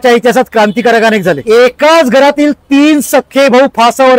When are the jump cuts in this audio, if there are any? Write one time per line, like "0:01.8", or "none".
0:01.4